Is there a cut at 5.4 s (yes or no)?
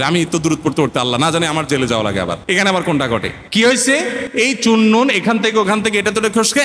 no